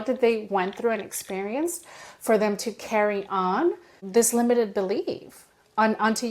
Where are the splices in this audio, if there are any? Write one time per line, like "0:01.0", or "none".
0:04.0